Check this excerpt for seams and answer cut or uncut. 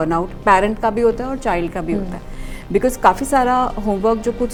uncut